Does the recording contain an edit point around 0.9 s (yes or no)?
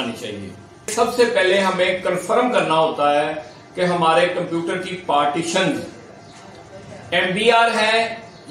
yes